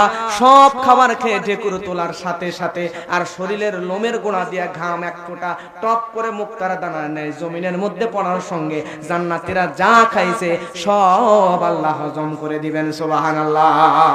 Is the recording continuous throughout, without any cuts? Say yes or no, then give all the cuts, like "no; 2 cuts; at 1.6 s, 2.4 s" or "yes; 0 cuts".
yes; 0 cuts